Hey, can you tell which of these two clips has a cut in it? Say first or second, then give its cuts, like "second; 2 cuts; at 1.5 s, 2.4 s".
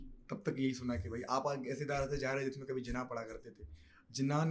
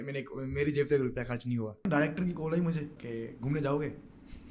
second; 2 cuts; at 1.9 s, 3.0 s